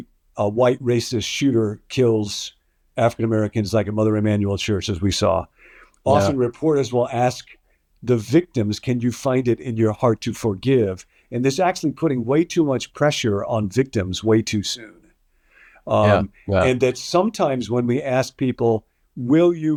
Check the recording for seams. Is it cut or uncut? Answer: uncut